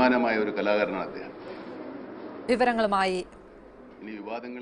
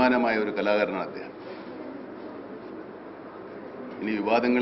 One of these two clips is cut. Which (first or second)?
second